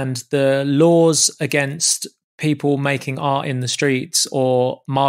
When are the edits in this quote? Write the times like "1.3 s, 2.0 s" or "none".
none